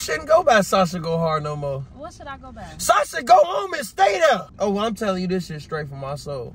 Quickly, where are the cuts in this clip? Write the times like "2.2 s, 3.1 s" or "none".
4.6 s